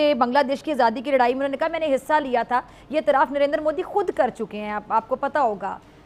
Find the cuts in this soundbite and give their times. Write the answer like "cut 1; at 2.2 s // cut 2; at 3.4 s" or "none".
none